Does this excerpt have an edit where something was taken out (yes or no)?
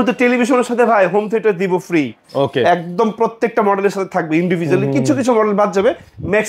no